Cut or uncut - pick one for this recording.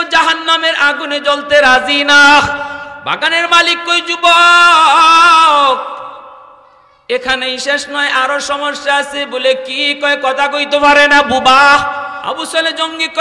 cut